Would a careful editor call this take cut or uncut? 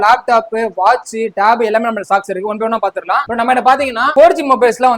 uncut